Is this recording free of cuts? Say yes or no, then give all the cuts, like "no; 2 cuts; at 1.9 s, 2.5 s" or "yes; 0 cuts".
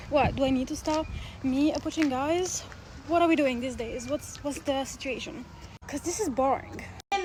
yes; 0 cuts